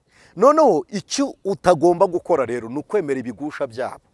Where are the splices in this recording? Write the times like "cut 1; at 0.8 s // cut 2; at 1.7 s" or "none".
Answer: none